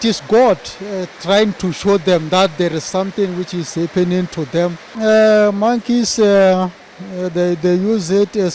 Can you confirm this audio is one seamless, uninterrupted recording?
no; 1 cut; at 4.8 s

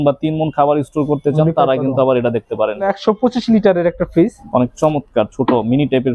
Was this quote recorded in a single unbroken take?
no; 2 cuts; at 2.9 s, 4.4 s

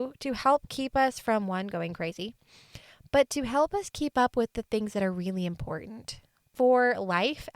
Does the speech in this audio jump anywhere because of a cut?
yes; 1 cut; at 6.5 s

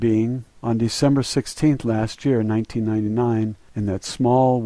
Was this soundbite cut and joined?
yes; 1 cut; at 2.8 s

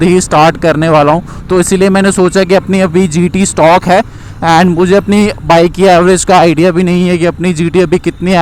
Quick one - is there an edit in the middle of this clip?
no; 0 cuts

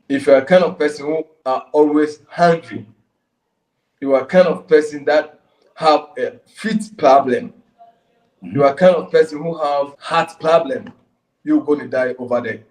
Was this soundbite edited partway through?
yes; 2 cuts; at 1.3 s, 10.0 s

